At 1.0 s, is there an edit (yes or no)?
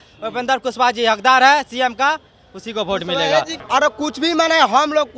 no